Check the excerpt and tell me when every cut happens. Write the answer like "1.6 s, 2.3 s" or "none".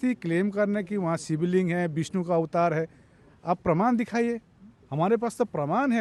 none